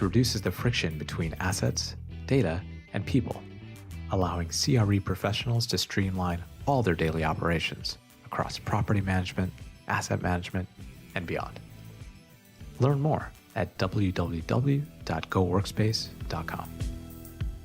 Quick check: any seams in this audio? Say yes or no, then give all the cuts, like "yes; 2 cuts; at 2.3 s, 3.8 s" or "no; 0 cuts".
yes; 1 cut; at 16.6 s